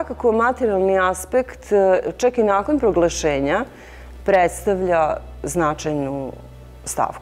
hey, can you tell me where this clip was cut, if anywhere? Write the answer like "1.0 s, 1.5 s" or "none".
none